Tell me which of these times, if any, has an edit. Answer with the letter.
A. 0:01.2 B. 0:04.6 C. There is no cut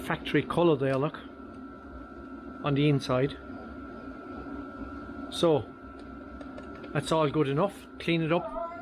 C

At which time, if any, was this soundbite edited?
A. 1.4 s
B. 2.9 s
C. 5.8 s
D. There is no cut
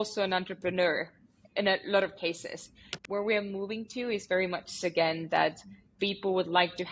B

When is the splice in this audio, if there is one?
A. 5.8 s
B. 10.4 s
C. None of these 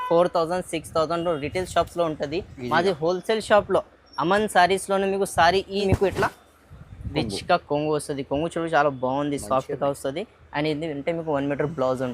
A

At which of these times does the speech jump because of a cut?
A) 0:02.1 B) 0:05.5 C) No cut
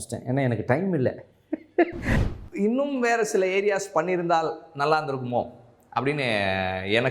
A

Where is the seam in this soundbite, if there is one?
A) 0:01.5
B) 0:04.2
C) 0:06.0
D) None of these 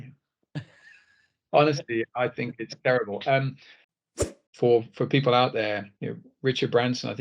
B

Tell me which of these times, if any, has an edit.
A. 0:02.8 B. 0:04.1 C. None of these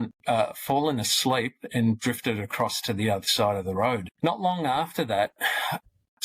B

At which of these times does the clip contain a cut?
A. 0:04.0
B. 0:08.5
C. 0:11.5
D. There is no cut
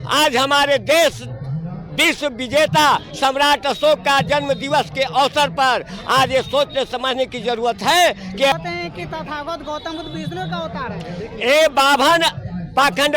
B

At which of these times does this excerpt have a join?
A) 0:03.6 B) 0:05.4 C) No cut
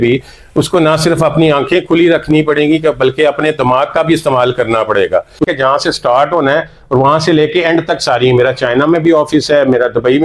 B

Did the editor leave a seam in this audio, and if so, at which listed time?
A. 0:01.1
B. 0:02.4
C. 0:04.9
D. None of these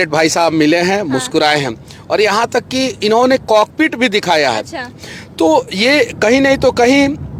D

